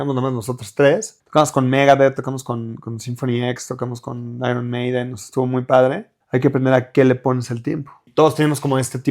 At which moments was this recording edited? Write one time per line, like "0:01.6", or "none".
0:01.1
0:06.1
0:08.1